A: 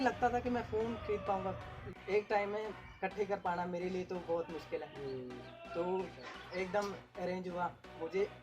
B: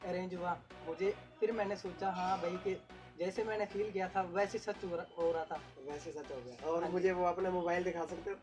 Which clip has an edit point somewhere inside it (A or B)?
A